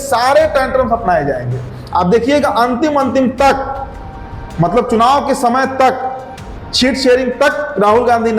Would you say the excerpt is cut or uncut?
uncut